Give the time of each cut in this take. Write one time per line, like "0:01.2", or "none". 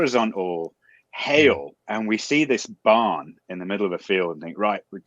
0:01.8